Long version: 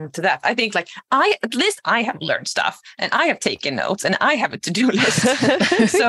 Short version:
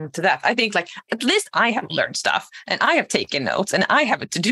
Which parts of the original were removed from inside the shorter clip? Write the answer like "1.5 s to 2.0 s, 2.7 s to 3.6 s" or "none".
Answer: 1.1 s to 1.4 s